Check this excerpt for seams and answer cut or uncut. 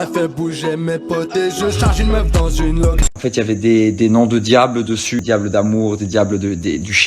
cut